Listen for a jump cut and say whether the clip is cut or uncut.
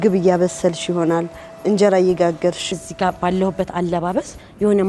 cut